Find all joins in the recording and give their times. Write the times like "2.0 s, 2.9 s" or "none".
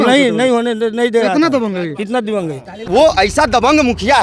2.8 s